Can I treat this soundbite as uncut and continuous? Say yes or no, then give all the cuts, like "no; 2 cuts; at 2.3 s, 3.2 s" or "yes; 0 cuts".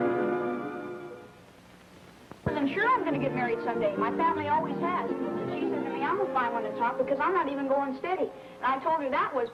yes; 0 cuts